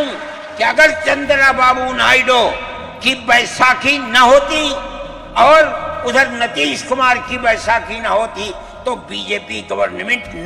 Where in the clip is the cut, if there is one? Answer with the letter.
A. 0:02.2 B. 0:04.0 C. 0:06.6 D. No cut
D